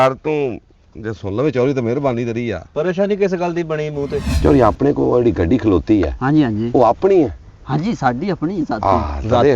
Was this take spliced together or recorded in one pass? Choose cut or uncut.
cut